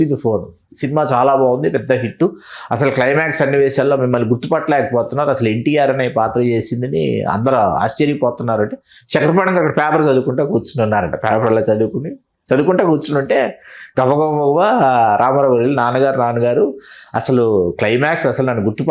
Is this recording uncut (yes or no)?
yes